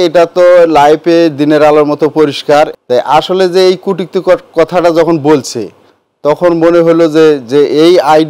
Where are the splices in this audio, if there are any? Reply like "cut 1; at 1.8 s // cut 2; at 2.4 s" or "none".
cut 1; at 2.8 s